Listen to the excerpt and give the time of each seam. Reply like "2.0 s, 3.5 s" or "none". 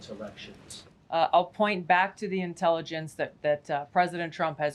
none